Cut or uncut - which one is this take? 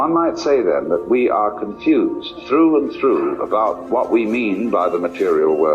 cut